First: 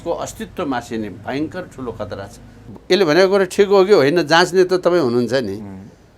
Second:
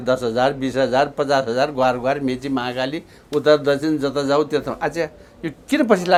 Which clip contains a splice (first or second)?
first